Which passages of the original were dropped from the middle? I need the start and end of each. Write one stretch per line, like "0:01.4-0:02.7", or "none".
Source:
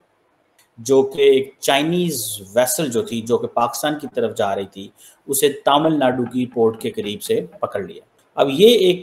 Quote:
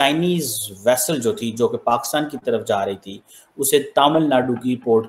none